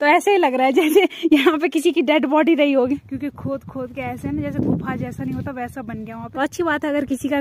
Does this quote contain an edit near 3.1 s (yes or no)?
yes